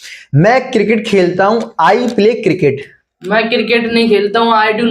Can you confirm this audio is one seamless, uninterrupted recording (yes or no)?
yes